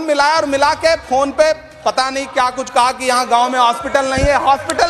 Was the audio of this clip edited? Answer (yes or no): no